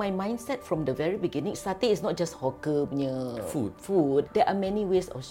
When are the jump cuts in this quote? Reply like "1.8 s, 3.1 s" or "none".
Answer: 4.3 s